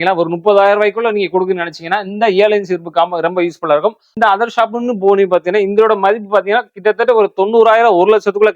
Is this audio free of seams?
no; 1 cut; at 4.1 s

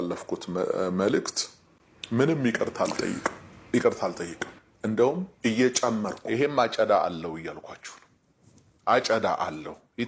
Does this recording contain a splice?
yes; 2 cuts; at 3.5 s, 6.2 s

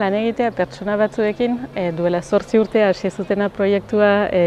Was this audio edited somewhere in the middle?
no; 0 cuts

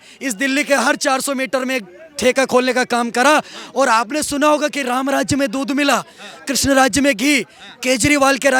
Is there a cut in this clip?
no; 0 cuts

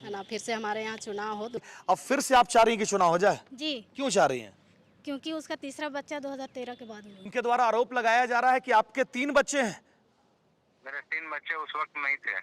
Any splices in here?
yes; 2 cuts; at 1.7 s, 7.3 s

